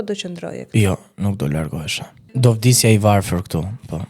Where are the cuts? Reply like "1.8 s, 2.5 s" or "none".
2.4 s